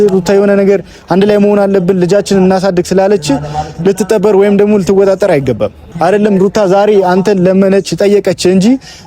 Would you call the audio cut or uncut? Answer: cut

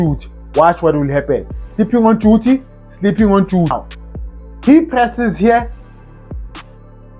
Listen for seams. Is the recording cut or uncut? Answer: cut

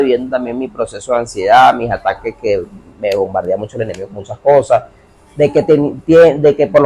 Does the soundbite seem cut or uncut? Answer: uncut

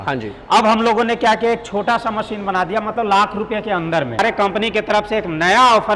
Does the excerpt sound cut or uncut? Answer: cut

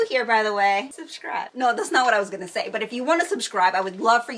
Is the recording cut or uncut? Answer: uncut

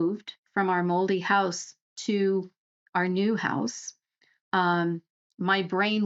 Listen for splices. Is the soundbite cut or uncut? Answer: uncut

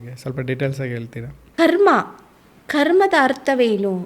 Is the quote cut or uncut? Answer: cut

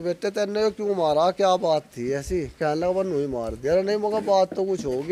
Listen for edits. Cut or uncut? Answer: uncut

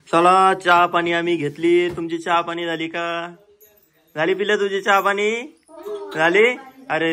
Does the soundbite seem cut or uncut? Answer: uncut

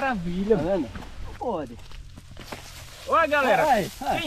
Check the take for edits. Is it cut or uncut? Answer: cut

